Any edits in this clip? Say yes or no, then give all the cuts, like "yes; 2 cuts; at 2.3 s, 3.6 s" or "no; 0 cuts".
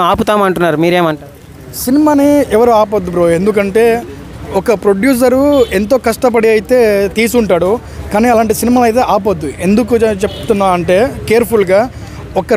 no; 0 cuts